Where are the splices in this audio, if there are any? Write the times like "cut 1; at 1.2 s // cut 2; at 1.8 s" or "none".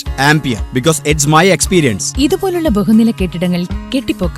none